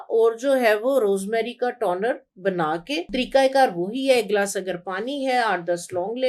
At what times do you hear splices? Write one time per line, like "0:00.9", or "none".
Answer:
0:03.1